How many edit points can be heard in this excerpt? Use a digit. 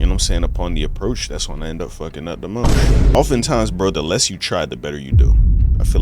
1